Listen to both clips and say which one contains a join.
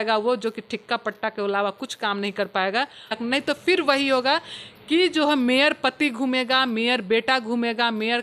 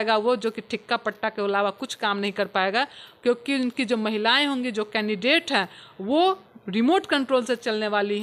first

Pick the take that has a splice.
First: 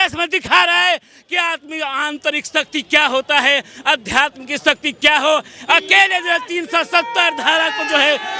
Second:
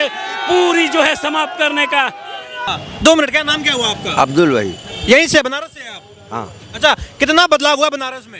second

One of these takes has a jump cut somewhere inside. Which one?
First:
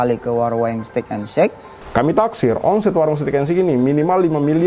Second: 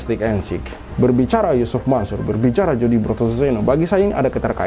first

